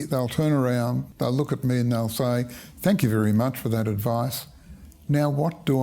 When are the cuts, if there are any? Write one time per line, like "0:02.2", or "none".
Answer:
0:01.1